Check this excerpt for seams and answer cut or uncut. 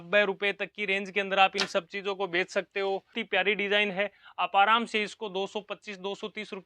cut